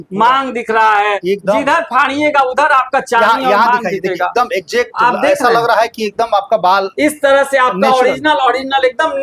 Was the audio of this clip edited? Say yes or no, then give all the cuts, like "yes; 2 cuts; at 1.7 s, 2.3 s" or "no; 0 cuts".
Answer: no; 0 cuts